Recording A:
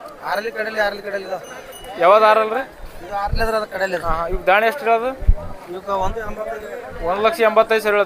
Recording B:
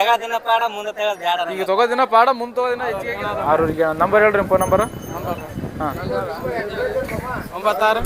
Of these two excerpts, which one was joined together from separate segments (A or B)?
B